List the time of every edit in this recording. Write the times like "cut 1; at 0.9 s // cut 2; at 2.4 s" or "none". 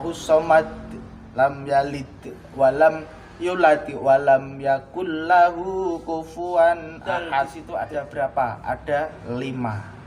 cut 1; at 7.6 s